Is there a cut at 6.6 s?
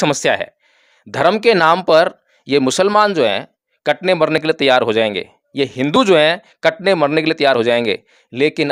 no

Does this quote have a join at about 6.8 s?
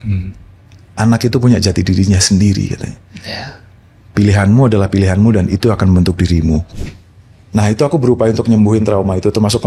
yes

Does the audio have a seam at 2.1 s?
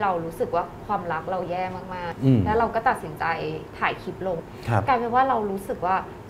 yes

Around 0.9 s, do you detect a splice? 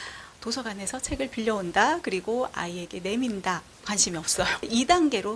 no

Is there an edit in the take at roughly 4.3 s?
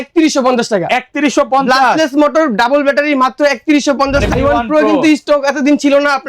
yes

